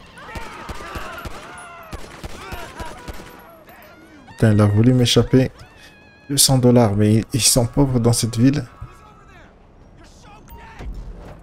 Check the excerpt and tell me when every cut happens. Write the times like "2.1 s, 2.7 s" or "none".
none